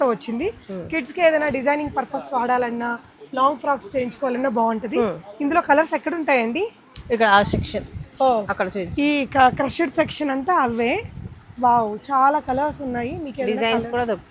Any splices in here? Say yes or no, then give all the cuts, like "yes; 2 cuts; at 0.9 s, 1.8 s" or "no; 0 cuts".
no; 0 cuts